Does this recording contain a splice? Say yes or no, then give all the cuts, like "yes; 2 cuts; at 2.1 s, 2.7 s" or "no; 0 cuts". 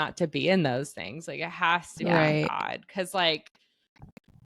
no; 0 cuts